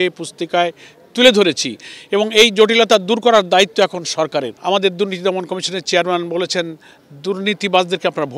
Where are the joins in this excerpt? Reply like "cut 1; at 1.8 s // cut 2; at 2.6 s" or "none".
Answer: cut 1; at 4.5 s